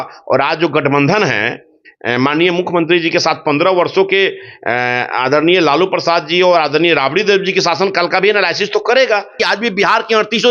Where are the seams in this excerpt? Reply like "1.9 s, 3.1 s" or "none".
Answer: 9.4 s

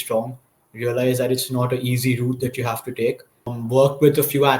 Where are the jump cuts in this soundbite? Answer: 3.6 s

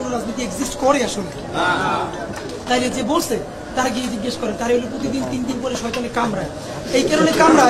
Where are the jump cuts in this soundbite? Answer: none

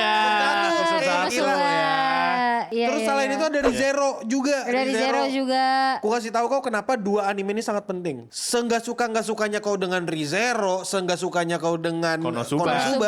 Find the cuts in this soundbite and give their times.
none

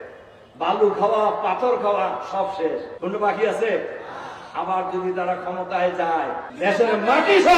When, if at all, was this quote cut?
2.9 s, 6.5 s

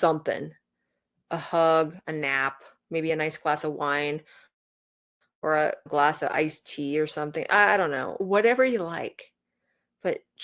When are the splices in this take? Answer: 8.2 s

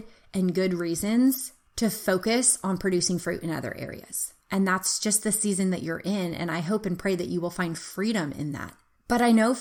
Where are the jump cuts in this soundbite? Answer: none

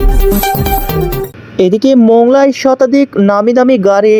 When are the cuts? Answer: none

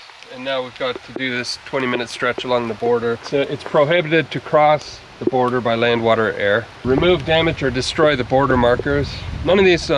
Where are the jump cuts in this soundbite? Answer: 3.2 s, 6.7 s

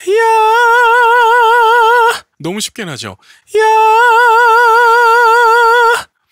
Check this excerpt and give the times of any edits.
none

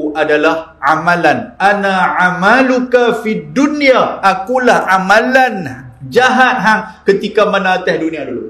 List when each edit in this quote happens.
none

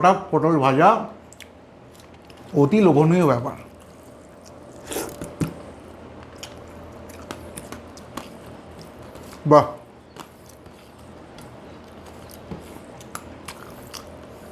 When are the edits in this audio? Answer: none

